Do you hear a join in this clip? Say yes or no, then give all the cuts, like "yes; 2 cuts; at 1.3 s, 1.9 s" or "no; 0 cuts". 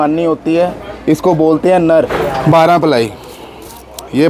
yes; 1 cut; at 2.1 s